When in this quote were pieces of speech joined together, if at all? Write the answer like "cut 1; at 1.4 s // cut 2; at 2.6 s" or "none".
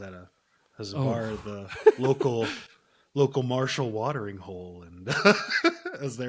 none